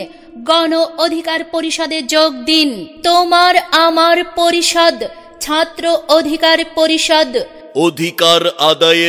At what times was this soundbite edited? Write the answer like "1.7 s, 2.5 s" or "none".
none